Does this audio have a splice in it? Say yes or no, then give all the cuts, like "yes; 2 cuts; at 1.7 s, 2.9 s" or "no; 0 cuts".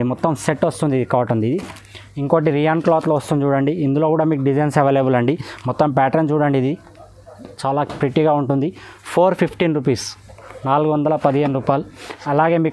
no; 0 cuts